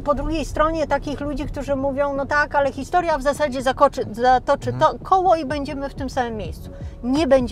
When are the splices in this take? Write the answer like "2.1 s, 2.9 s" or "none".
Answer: none